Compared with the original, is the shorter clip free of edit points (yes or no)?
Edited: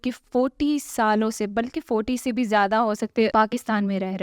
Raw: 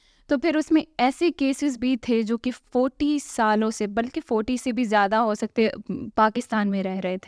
no